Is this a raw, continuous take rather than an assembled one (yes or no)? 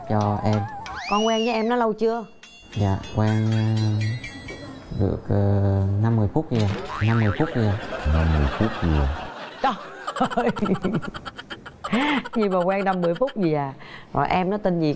yes